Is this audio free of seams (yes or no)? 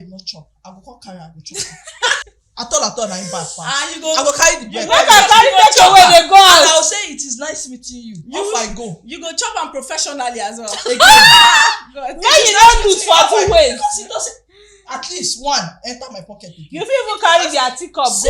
no